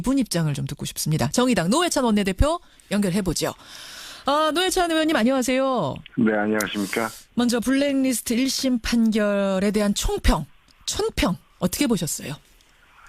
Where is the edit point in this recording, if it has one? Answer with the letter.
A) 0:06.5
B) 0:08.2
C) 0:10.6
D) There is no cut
B